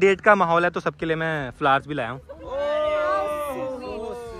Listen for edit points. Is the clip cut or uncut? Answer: uncut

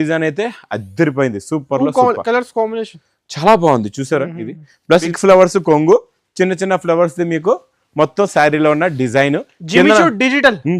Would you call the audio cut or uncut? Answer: cut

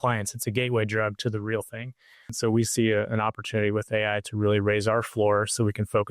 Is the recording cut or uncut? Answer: cut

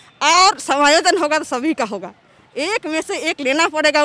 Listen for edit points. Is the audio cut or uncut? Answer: uncut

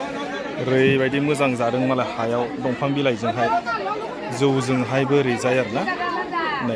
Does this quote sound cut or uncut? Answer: uncut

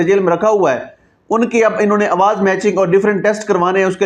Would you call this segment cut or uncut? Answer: uncut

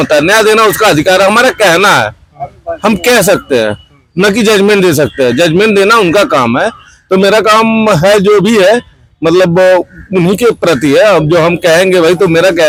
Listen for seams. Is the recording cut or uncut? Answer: uncut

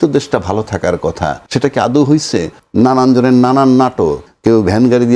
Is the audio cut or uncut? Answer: cut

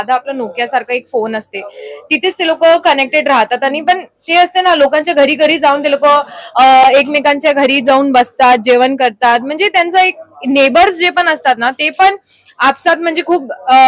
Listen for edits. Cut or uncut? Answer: uncut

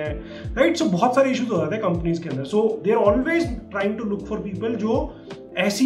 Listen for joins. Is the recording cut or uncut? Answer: uncut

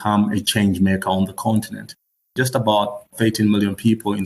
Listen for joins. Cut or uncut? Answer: cut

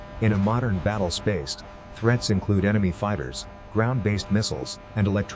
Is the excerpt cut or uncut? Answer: uncut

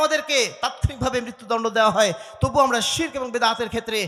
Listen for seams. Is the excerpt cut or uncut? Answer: uncut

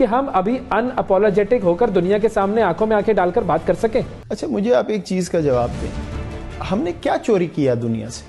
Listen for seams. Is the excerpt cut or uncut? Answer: uncut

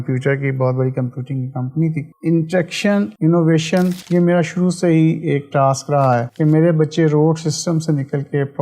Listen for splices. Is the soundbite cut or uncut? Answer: cut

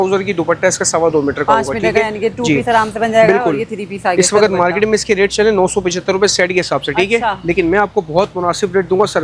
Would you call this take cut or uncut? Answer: uncut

